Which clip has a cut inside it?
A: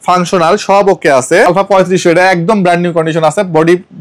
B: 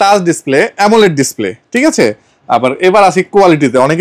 A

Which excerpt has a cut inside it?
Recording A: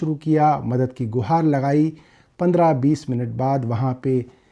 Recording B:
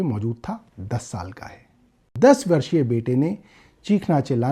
B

